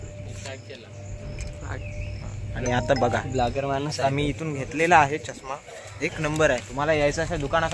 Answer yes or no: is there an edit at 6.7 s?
yes